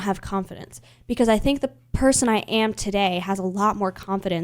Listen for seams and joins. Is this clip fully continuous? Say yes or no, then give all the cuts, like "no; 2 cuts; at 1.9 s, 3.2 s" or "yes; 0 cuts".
yes; 0 cuts